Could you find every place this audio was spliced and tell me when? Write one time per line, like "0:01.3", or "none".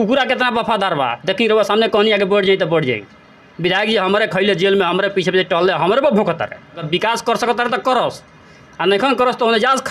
0:06.8